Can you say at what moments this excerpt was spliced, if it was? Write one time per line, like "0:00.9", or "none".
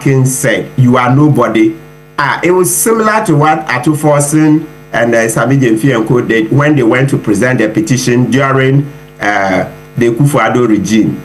none